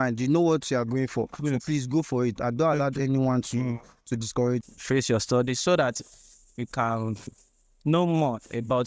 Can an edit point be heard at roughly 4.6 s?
yes; 1 cut; at 4.6 s

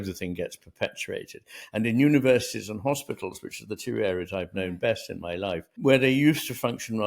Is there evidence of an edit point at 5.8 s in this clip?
yes; 1 cut; at 5.8 s

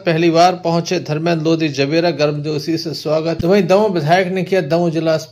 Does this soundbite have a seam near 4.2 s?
no; 0 cuts

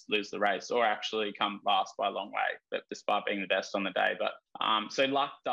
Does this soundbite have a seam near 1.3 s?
no; 2 cuts; at 2.9 s, 4.5 s

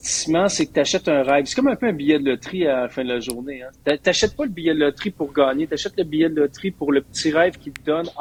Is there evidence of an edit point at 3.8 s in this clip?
no; 0 cuts

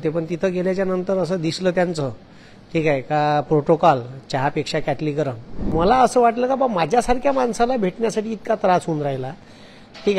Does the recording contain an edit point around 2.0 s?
no; 1 cut; at 5.7 s

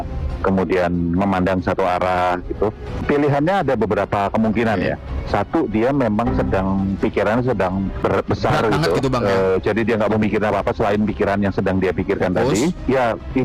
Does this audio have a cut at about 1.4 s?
no; 2 cuts; at 3.0 s, 7.9 s

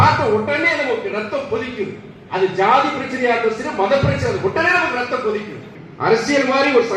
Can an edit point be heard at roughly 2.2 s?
no; 1 cut; at 5.8 s

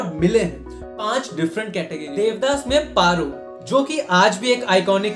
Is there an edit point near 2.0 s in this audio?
yes; 1 cut; at 2.0 s

